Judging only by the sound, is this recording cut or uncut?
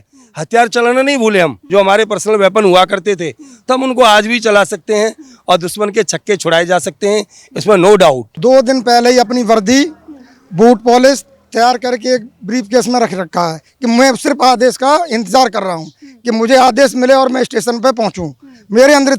cut